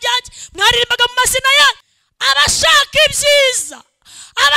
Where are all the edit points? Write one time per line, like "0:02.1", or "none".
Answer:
0:01.8

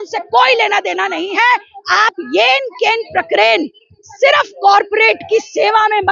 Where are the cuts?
none

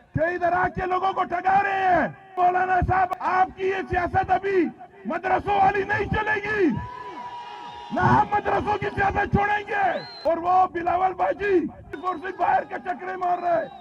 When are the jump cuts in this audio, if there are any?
0:02.3
0:03.1
0:10.1
0:11.9

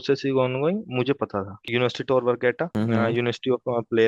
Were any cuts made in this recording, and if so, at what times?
0:01.6
0:02.7

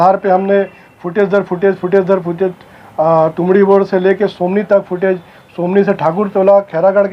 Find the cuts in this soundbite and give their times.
none

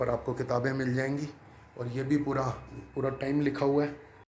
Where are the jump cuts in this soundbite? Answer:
none

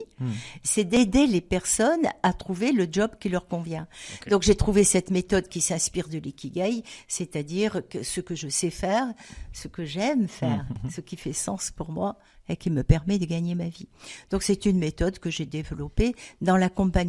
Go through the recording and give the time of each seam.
0:01.0
0:10.8

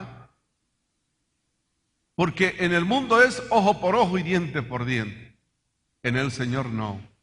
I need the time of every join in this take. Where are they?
0:02.5

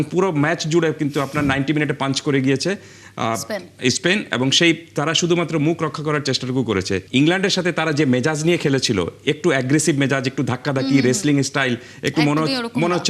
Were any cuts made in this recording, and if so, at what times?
0:07.0

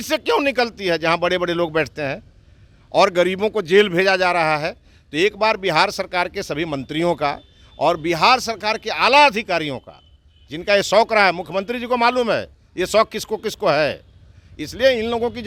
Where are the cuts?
none

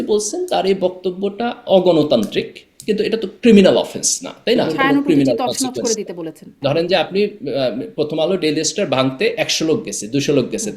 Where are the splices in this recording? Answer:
0:04.7
0:06.5

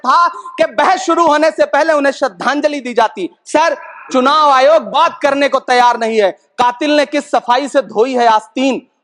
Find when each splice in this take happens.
none

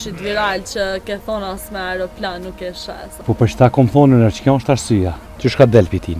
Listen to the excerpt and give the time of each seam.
0:03.2
0:05.2

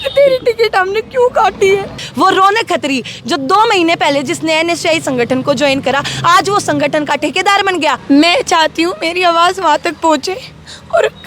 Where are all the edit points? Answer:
0:02.0
0:08.0

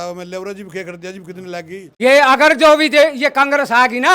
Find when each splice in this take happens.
0:01.9

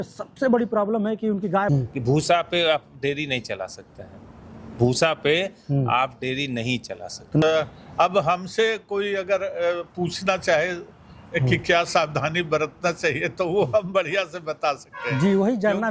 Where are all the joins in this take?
0:01.7
0:07.4

